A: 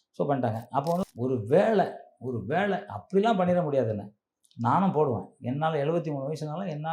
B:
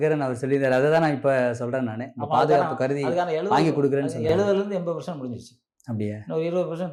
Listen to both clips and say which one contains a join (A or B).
A